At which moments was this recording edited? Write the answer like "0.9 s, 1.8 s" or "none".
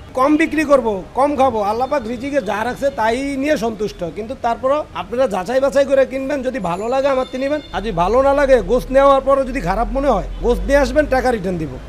5.0 s, 7.7 s, 10.3 s